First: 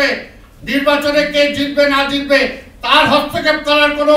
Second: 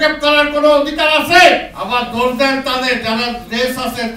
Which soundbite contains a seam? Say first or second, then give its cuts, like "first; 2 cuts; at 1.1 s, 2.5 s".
second; 1 cut; at 1.7 s